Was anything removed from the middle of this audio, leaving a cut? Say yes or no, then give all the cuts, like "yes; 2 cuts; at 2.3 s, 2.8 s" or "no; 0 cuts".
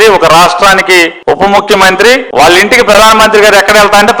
no; 0 cuts